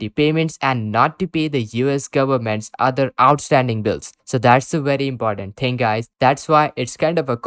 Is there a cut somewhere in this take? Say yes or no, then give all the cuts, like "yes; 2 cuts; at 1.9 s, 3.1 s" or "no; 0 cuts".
no; 0 cuts